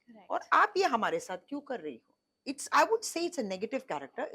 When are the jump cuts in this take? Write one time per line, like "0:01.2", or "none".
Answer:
0:02.3